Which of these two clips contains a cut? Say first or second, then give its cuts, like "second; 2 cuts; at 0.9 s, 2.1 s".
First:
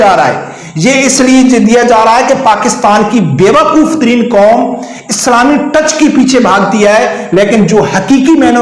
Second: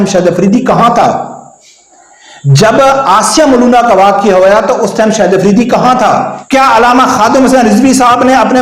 second; 1 cut; at 6.4 s